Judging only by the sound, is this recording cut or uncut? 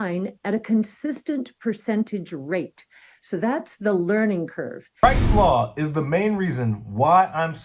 uncut